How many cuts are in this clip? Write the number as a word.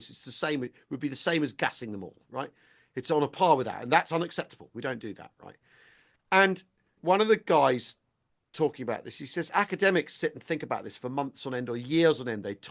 one